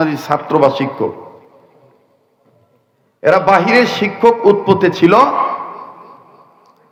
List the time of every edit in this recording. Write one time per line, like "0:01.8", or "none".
none